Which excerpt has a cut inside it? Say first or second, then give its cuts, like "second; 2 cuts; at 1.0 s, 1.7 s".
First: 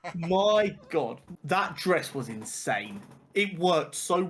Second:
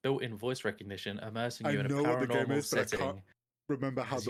first; 1 cut; at 1.3 s